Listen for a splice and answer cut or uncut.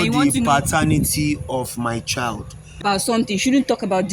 cut